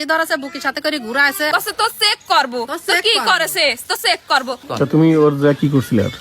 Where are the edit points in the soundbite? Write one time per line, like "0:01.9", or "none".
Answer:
0:01.5
0:04.6